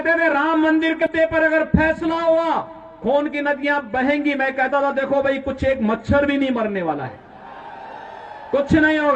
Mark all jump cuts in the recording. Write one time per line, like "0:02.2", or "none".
0:01.0